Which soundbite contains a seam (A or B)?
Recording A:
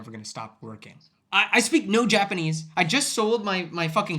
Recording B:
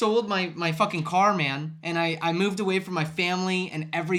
A